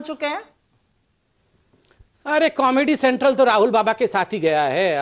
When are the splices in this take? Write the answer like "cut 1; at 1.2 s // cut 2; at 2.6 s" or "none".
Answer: none